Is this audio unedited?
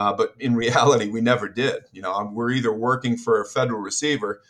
yes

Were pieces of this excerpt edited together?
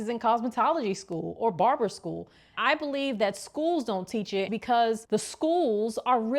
yes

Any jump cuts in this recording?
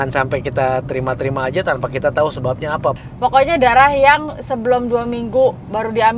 yes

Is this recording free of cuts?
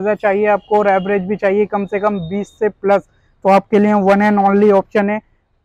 yes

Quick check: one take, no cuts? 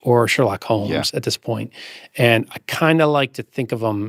yes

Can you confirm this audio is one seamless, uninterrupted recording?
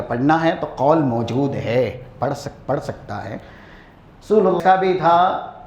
no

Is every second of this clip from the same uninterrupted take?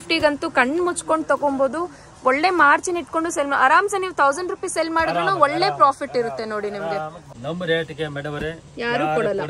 no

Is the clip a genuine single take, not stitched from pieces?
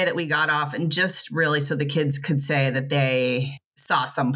yes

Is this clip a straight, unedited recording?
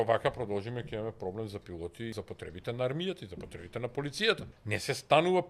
no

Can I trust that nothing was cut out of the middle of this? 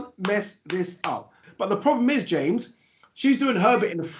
no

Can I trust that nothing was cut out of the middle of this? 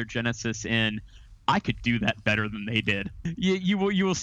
no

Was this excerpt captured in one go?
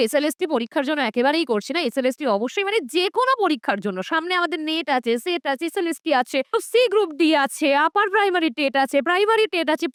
yes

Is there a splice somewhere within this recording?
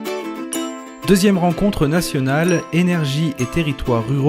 yes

